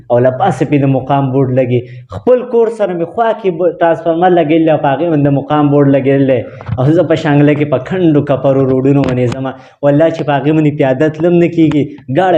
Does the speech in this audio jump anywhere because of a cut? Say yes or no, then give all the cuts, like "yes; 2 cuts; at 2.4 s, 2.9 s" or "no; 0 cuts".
no; 0 cuts